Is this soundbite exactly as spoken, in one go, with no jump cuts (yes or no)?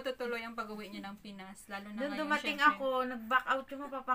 yes